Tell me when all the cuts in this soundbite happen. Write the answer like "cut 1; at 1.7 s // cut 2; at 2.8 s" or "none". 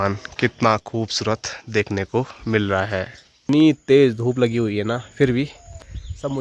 cut 1; at 3.4 s